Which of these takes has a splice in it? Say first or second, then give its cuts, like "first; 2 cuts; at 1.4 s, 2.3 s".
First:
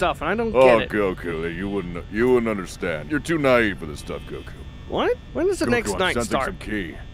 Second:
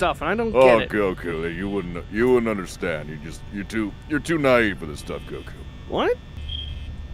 first; 2 cuts; at 3.0 s, 5.3 s